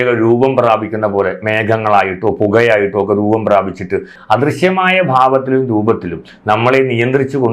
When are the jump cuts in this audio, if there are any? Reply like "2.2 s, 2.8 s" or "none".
4.2 s